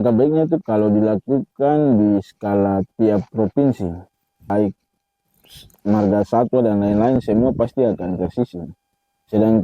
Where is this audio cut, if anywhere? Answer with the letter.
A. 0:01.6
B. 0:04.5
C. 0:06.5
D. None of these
B